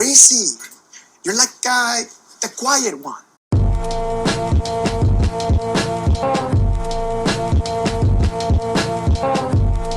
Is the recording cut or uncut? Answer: cut